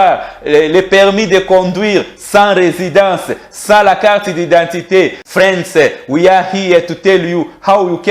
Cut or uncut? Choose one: cut